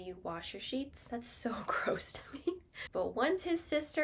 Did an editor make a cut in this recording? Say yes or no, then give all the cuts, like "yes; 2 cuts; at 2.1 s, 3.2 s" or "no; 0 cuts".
yes; 2 cuts; at 1.0 s, 2.8 s